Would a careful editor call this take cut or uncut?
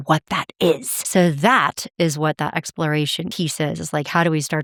uncut